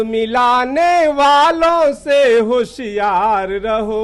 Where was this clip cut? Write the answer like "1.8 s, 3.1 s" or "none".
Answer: none